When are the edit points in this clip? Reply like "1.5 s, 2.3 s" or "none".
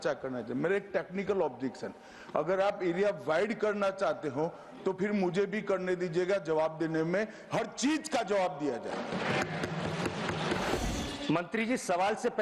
10.8 s